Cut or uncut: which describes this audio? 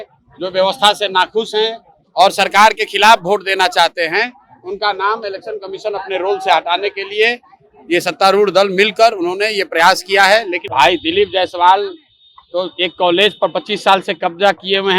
cut